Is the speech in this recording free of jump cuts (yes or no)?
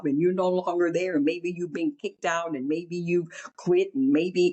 yes